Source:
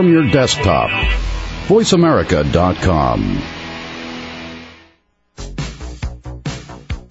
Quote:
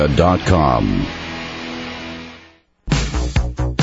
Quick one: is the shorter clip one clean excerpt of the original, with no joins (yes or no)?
no